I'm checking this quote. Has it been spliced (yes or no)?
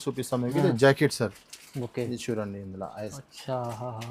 no